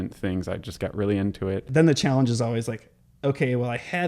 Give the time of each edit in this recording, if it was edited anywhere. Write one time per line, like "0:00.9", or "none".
0:01.7